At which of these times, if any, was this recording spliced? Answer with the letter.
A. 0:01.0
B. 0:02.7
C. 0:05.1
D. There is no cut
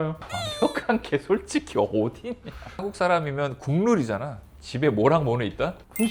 B